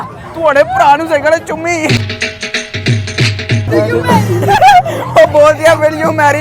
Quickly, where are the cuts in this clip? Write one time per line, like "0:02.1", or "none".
0:03.6
0:04.4